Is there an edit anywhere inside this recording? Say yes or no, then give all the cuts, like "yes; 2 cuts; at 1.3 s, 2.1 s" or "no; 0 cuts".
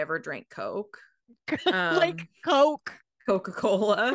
no; 0 cuts